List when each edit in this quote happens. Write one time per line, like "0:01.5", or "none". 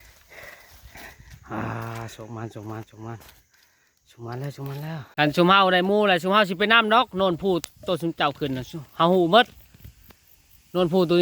0:05.1